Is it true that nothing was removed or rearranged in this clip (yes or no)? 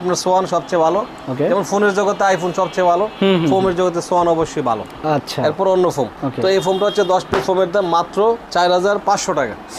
yes